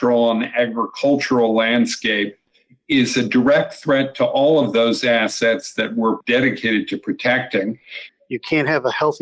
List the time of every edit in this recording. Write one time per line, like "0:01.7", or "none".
0:06.2
0:08.0